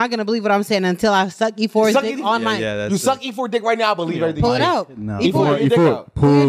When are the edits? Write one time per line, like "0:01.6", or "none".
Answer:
none